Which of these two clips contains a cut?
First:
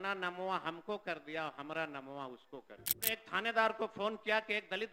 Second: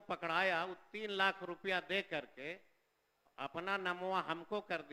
first; 1 cut; at 3.0 s

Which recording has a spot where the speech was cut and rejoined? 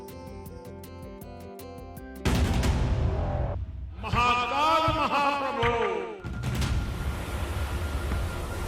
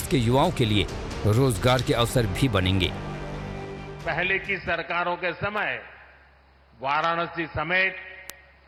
first; 1 cut; at 5.9 s

